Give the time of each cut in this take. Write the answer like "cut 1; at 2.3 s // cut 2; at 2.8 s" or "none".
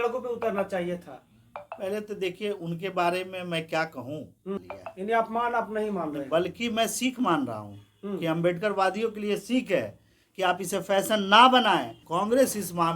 cut 1; at 4.6 s // cut 2; at 12.0 s

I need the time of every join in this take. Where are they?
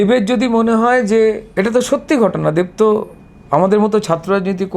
cut 1; at 1.5 s

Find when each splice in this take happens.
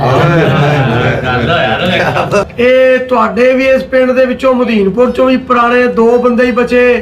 cut 1; at 2.5 s

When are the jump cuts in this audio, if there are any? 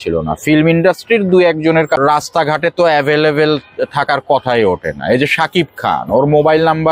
cut 1; at 2.0 s

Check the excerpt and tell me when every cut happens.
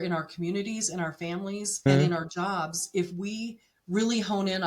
cut 1; at 1.9 s

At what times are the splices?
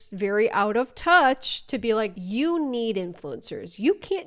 none

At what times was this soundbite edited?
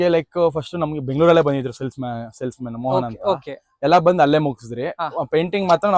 none

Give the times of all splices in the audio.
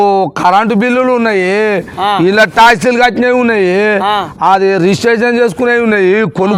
none

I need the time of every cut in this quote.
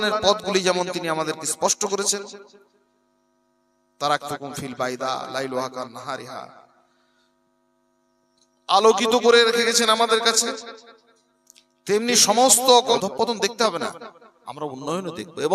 cut 1; at 13.0 s

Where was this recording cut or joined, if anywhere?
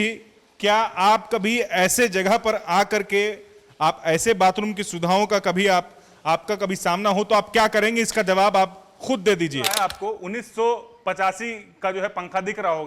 cut 1; at 9.7 s

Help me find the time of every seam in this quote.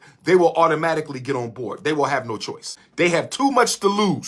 cut 1; at 3.2 s

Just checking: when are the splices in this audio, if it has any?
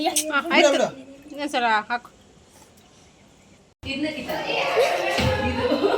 cut 1; at 3.7 s

